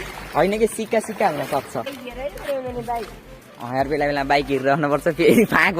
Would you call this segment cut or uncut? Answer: cut